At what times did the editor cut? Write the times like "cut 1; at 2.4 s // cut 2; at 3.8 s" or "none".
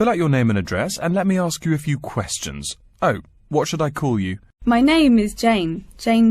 cut 1; at 4.4 s